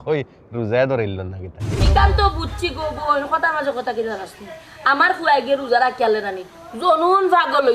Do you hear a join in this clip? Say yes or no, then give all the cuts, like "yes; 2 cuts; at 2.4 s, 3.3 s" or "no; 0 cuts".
yes; 1 cut; at 1.8 s